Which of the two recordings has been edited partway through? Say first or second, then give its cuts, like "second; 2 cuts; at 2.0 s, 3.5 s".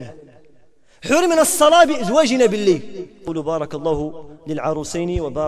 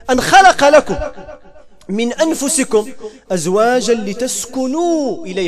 first; 1 cut; at 3.2 s